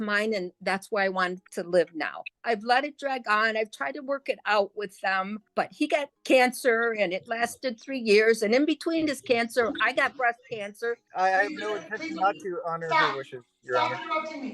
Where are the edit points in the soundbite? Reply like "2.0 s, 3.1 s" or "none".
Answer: 2.3 s, 5.9 s, 11.1 s